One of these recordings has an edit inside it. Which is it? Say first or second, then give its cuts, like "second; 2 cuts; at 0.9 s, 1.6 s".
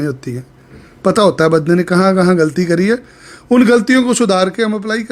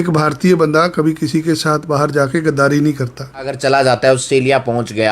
second; 1 cut; at 3.5 s